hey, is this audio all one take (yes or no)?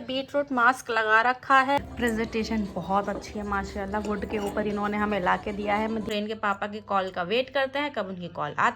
no